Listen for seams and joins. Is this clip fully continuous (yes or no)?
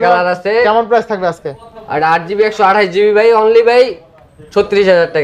yes